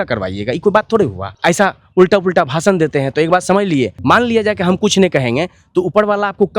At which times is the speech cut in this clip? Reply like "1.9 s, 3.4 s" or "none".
1.2 s, 4.0 s